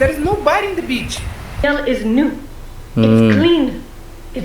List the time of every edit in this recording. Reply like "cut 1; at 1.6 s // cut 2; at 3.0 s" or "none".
cut 1; at 1.6 s